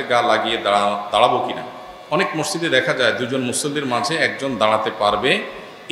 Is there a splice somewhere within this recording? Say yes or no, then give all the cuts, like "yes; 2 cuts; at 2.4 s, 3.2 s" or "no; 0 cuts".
no; 0 cuts